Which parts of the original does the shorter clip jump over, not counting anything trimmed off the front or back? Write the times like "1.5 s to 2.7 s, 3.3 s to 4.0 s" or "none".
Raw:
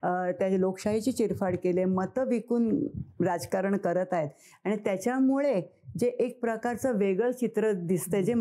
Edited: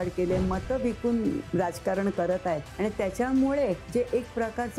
2.9 s to 3.1 s, 4.3 s to 4.5 s, 5.7 s to 5.9 s